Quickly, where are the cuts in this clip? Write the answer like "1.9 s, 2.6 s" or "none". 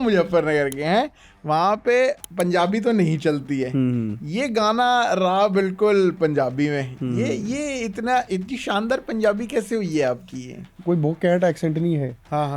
2.2 s, 10.8 s

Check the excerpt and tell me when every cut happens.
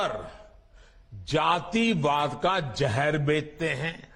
none

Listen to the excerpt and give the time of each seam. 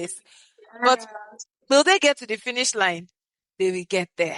none

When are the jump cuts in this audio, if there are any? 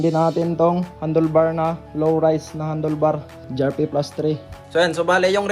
0.9 s, 3.5 s, 4.5 s

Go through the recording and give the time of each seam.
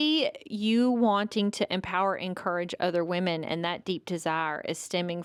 none

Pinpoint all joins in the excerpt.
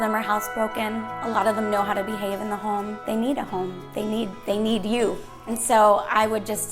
3.0 s, 5.4 s

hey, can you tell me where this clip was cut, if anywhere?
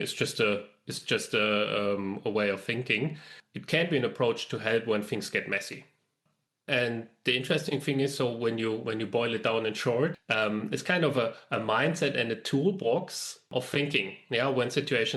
3.1 s, 10.2 s, 13.5 s

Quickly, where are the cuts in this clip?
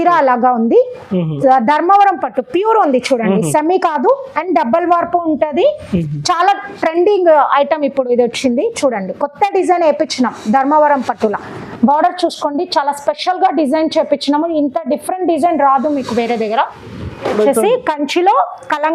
17.3 s

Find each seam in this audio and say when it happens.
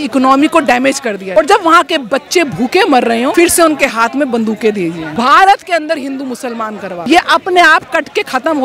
1.2 s, 3.3 s, 5.0 s, 7.0 s

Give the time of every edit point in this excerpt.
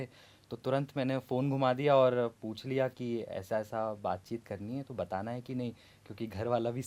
none

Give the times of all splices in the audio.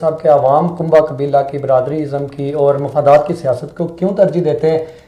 none

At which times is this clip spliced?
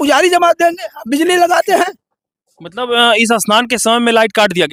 none

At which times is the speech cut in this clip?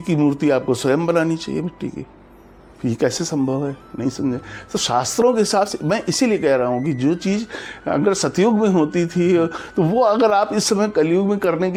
none

